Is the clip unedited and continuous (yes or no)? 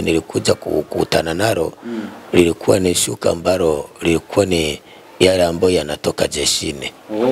yes